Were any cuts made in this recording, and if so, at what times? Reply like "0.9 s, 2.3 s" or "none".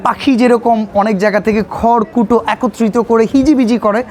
none